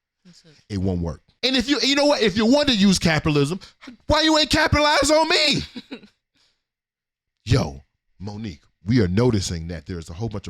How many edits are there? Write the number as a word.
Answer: one